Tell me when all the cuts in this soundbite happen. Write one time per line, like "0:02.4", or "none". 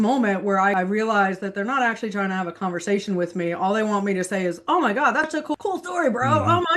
0:00.7
0:05.3